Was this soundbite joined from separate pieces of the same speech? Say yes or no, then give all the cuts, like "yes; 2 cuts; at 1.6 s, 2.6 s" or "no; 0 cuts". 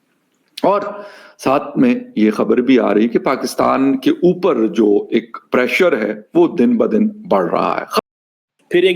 yes; 1 cut; at 8.0 s